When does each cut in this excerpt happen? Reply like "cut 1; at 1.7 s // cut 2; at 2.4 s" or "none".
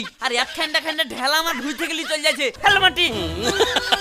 cut 1; at 2.6 s